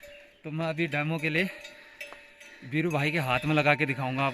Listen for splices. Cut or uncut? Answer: uncut